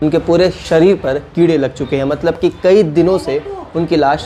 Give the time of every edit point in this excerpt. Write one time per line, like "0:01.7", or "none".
none